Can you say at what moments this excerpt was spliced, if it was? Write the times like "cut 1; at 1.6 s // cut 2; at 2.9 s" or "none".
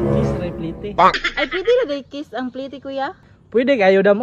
cut 1; at 1.3 s

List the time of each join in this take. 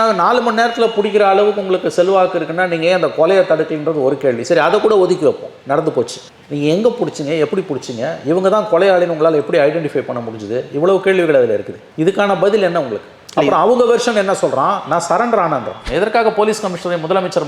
cut 1; at 15.8 s

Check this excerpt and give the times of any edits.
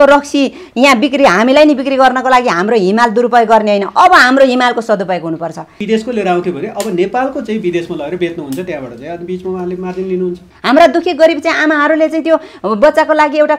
cut 1; at 5.7 s // cut 2; at 10.5 s

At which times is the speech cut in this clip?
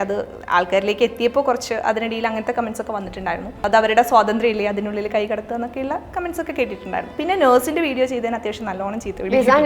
cut 1; at 3.6 s // cut 2; at 7.1 s

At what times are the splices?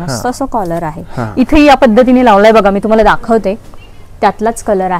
none

